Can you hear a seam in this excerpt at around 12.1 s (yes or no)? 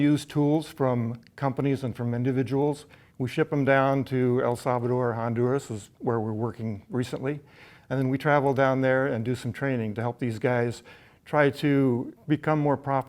yes